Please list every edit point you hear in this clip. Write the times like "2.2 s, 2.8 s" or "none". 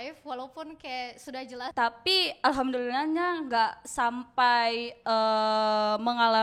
1.6 s